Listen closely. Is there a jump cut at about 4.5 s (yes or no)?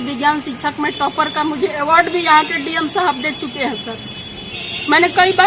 no